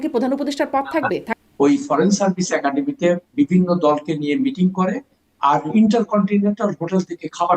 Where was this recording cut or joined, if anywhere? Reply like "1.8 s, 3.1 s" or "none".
1.3 s